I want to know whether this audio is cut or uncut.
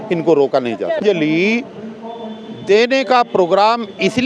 cut